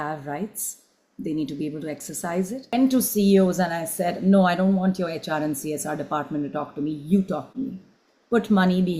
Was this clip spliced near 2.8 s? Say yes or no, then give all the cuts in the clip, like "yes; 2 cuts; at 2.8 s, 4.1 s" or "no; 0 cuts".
yes; 1 cut; at 2.8 s